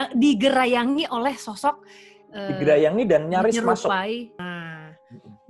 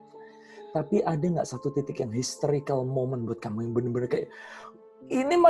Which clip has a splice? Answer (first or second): first